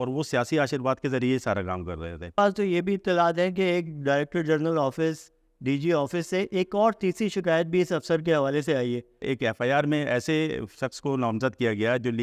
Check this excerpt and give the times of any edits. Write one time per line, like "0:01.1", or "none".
0:02.3
0:09.2